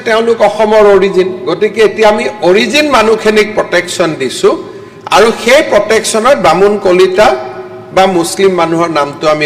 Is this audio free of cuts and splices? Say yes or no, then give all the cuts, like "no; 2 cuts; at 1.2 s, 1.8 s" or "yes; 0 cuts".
yes; 0 cuts